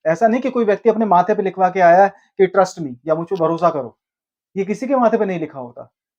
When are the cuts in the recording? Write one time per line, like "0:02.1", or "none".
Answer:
none